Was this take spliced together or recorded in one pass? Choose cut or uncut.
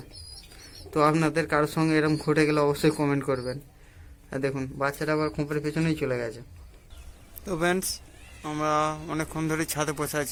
uncut